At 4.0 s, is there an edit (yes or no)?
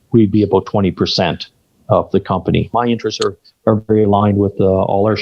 no